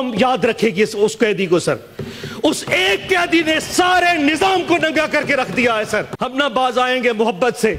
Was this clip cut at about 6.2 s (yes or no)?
yes